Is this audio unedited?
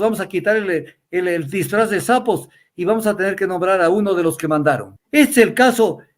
no; 1 cut; at 4.9 s

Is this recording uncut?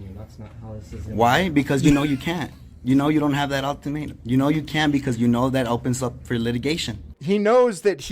no; 1 cut; at 7.1 s

